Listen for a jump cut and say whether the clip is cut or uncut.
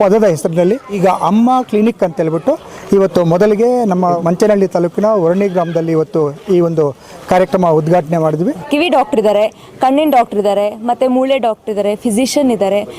cut